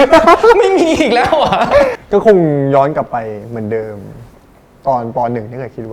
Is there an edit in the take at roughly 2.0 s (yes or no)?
yes